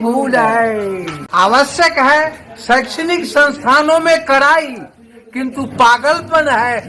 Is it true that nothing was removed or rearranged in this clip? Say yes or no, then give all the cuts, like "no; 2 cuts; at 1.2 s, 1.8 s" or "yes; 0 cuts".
no; 1 cut; at 1.1 s